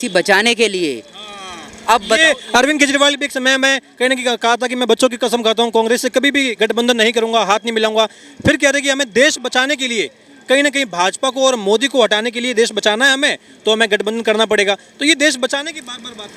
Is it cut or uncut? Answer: uncut